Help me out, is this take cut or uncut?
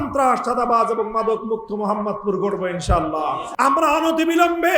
cut